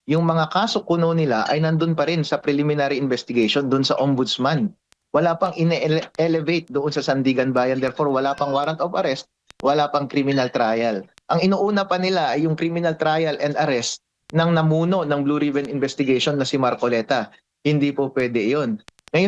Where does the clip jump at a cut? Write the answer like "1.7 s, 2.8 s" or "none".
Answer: none